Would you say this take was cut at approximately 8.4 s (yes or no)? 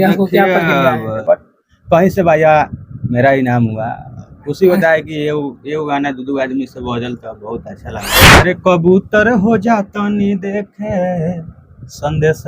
yes